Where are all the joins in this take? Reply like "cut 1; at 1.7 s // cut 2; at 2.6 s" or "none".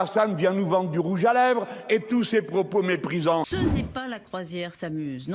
cut 1; at 3.5 s